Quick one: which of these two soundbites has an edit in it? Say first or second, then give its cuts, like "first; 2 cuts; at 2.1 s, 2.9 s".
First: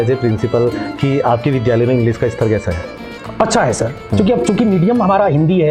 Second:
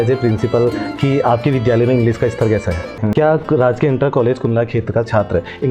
second; 1 cut; at 3.0 s